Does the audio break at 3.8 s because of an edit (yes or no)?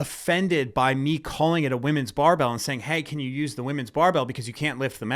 no